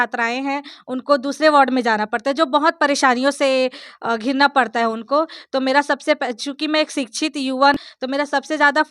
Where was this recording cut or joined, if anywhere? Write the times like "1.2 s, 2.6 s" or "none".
7.8 s